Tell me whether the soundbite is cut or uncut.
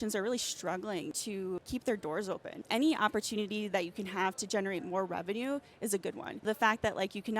cut